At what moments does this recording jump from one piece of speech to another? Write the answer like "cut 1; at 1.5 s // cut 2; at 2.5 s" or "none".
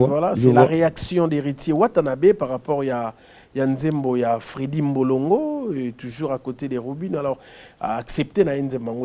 none